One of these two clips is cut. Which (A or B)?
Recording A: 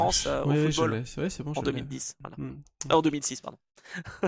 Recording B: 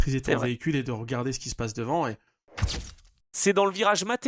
B